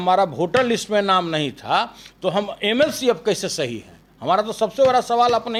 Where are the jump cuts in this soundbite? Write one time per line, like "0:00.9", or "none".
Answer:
none